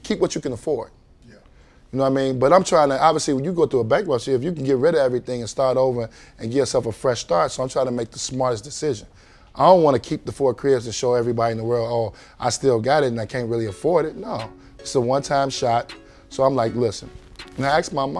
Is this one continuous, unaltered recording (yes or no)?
yes